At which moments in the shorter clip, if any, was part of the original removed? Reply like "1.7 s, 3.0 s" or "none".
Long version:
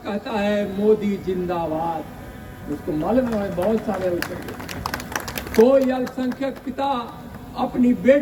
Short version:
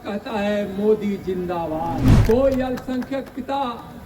2.1 s